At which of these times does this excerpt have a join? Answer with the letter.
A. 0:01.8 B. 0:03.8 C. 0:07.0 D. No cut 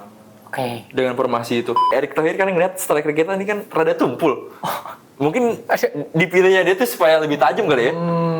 A